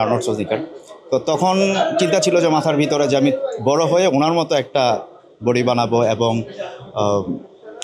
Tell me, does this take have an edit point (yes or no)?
no